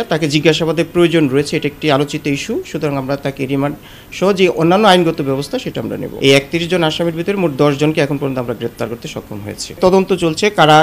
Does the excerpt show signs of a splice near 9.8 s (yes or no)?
yes